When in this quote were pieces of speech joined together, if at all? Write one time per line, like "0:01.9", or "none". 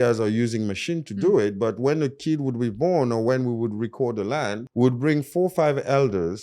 0:04.6